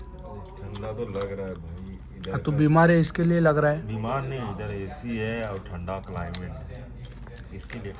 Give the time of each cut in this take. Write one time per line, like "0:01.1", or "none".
none